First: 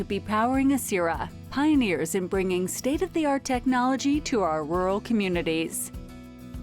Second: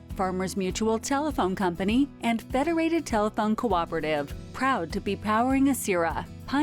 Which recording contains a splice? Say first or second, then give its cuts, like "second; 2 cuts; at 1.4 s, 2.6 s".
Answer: first; 1 cut; at 5.7 s